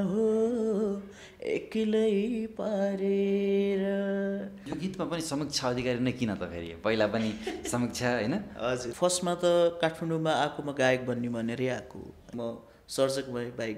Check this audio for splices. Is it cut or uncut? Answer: cut